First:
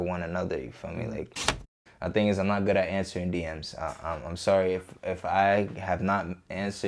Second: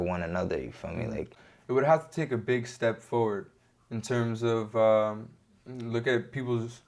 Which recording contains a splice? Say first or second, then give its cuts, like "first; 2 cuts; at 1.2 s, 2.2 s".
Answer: first; 1 cut; at 1.5 s